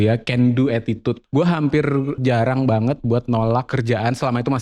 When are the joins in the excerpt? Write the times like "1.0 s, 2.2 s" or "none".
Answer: 1.2 s, 2.2 s, 3.7 s